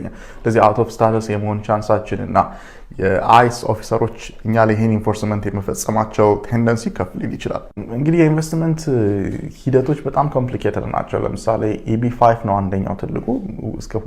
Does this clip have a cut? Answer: yes; 1 cut; at 7.8 s

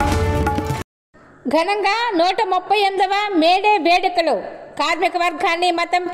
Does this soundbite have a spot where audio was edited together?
no; 0 cuts

